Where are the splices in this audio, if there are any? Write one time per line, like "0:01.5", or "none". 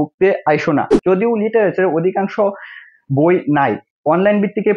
0:01.0